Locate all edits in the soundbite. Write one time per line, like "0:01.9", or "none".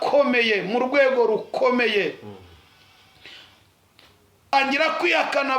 0:04.5